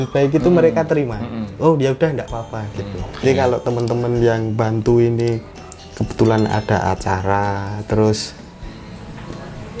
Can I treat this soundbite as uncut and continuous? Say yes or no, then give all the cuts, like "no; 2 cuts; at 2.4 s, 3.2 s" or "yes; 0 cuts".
no; 1 cut; at 3.2 s